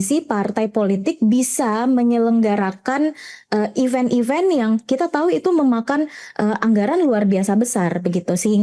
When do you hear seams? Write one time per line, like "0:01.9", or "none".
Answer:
none